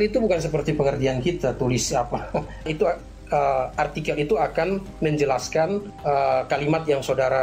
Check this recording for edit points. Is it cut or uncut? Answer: cut